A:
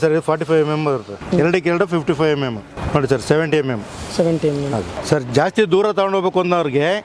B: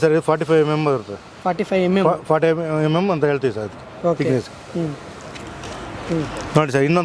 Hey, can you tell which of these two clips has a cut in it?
A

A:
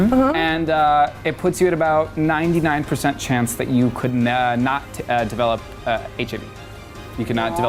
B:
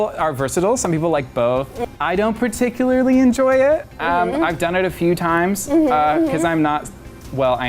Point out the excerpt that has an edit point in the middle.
B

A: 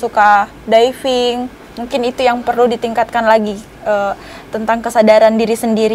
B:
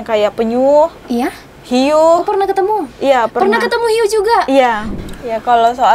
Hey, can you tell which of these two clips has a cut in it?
B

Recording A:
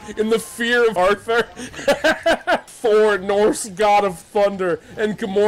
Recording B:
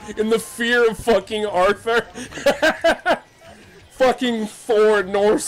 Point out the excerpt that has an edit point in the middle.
A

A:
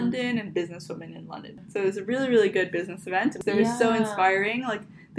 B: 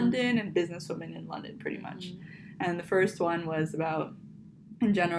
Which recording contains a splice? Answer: A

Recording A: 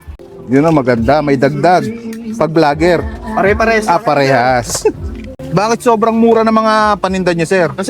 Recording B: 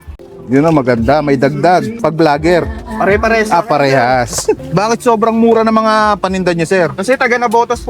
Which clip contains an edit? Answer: B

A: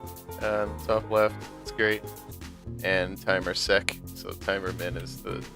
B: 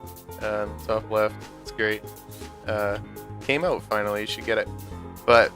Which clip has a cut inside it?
B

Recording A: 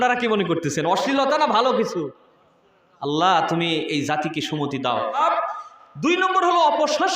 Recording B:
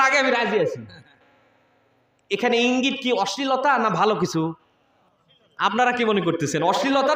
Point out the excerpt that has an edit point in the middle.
A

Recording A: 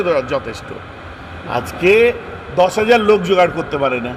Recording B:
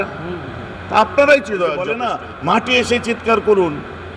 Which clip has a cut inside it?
B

